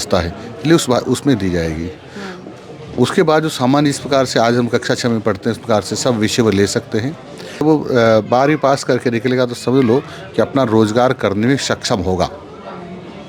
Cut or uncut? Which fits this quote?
cut